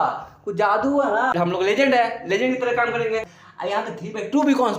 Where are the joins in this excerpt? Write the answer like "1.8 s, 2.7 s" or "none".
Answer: 1.3 s, 3.4 s